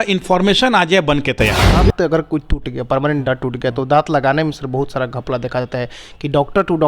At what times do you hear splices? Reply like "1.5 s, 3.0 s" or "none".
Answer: 1.9 s